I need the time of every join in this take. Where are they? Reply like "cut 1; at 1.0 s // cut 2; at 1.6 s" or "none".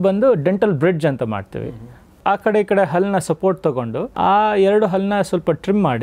cut 1; at 2.2 s // cut 2; at 4.0 s